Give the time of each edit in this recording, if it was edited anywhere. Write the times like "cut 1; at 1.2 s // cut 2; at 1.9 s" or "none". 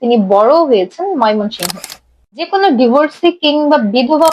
cut 1; at 1.8 s